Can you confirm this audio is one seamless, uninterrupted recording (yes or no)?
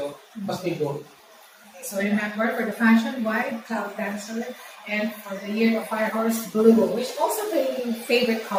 yes